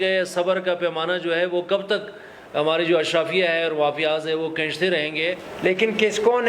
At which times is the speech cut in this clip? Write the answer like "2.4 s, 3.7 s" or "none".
5.5 s